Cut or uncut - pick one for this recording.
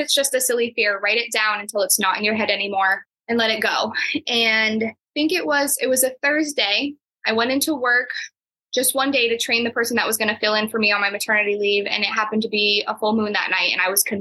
cut